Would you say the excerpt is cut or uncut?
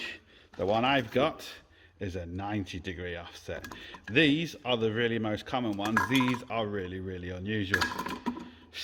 uncut